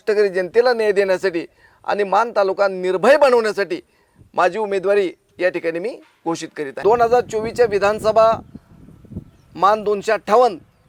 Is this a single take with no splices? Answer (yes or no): no